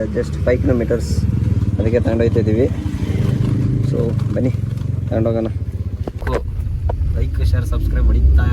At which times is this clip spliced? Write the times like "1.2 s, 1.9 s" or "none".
6.2 s